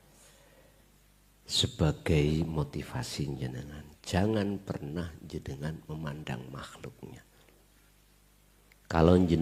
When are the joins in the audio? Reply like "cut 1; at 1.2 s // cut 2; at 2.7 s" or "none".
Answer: none